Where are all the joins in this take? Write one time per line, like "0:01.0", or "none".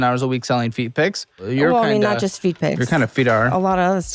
0:01.4